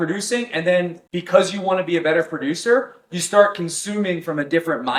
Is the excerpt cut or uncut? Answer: uncut